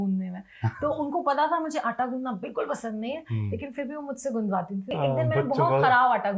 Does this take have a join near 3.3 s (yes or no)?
no